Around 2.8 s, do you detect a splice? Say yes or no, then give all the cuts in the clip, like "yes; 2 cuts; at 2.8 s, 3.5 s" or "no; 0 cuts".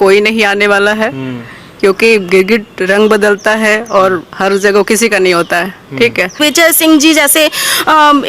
no; 1 cut; at 6.4 s